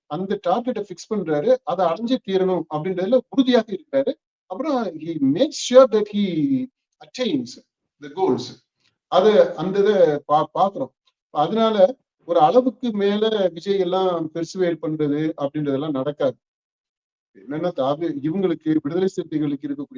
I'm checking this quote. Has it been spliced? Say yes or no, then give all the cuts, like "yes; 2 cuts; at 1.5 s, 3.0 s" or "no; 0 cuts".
no; 0 cuts